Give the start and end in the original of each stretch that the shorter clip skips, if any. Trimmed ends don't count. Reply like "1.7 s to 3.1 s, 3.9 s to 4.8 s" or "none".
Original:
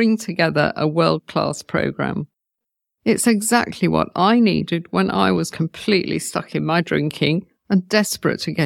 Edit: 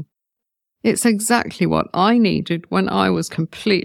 none